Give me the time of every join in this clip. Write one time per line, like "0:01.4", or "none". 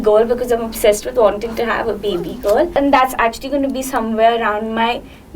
0:02.7